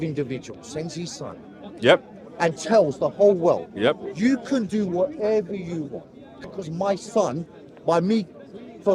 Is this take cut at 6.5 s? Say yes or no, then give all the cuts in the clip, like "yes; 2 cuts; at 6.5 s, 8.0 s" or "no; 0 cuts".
yes; 1 cut; at 6.5 s